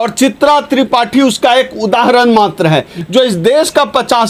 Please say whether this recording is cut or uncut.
cut